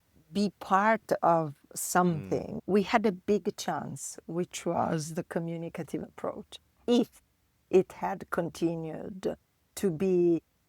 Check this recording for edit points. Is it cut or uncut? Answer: cut